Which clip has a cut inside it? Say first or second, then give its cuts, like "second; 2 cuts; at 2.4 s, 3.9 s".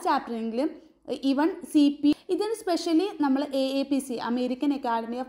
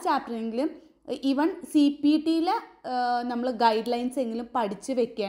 first; 1 cut; at 2.1 s